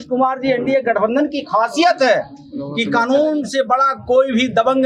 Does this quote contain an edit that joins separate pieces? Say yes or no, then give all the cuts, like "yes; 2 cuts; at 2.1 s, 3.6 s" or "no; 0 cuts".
no; 0 cuts